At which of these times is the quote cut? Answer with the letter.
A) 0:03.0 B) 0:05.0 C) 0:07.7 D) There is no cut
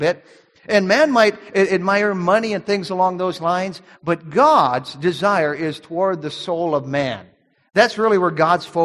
D